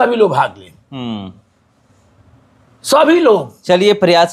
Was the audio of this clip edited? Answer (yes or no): no